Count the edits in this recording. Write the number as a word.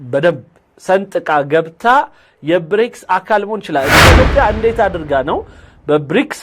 one